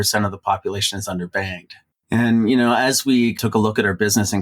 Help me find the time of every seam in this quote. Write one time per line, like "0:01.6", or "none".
0:01.8
0:03.4